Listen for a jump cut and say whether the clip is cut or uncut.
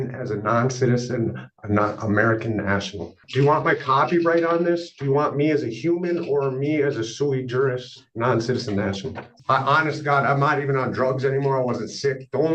cut